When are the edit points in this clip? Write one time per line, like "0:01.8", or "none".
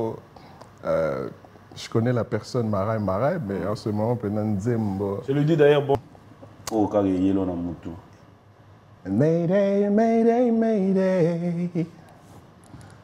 0:06.0